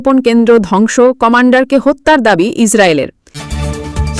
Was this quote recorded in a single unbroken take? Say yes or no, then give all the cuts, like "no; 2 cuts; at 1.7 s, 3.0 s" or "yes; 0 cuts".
no; 1 cut; at 3.2 s